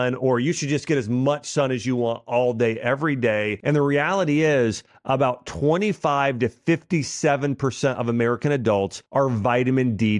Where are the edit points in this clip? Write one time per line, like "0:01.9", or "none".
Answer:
0:03.5
0:09.0